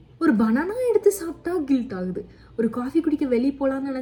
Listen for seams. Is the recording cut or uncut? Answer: uncut